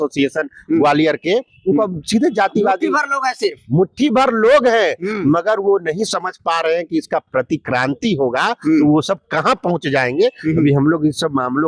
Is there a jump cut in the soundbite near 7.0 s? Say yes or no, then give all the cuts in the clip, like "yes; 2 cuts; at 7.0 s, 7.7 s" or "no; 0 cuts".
no; 0 cuts